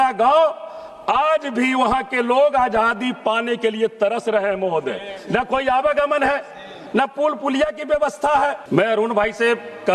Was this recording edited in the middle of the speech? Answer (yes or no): yes